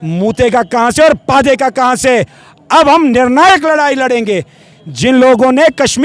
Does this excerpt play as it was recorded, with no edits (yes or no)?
yes